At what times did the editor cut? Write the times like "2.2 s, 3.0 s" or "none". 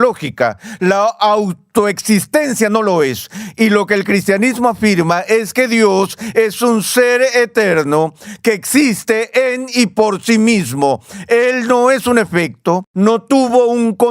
12.9 s